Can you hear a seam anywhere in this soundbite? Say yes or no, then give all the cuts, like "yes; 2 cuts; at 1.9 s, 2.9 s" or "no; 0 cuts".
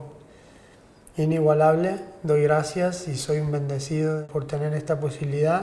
yes; 1 cut; at 4.2 s